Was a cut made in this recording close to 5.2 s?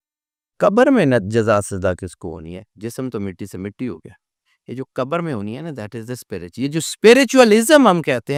no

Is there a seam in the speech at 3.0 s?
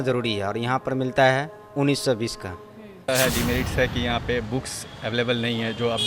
yes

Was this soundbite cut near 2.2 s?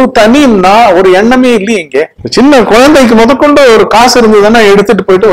yes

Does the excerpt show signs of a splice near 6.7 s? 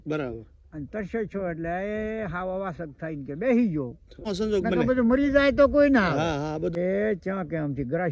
yes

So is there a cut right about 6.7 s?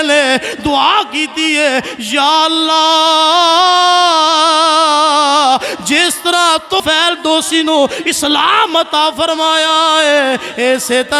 yes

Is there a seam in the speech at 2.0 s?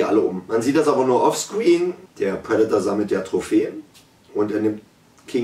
yes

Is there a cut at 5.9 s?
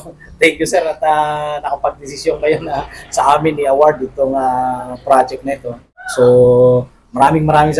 yes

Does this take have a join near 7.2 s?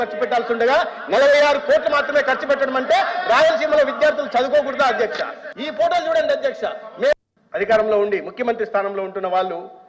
yes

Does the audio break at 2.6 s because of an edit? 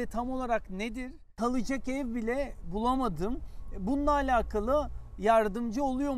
no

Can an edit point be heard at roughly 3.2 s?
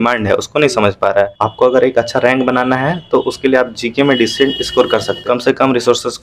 no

